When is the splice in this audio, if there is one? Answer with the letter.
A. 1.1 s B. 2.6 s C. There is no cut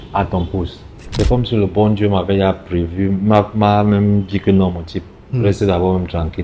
A